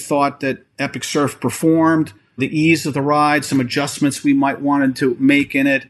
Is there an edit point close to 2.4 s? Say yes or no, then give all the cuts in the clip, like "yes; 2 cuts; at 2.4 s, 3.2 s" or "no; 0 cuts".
no; 0 cuts